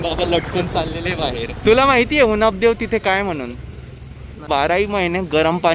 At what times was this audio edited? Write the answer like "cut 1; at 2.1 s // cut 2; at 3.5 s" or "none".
cut 1; at 1.6 s // cut 2; at 4.5 s